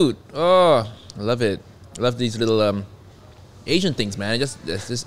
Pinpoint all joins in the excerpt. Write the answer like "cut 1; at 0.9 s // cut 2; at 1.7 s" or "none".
none